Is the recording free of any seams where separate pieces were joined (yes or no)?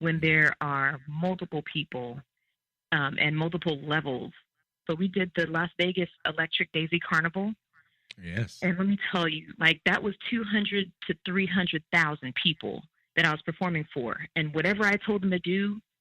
no